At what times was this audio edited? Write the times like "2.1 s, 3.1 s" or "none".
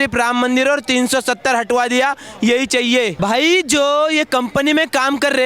3.2 s